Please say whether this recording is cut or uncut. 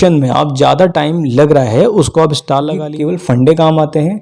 cut